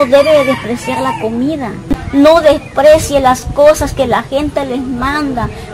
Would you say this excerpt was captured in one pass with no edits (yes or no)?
no